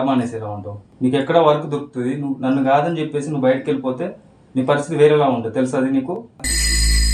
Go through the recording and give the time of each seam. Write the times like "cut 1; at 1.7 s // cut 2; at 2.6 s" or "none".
none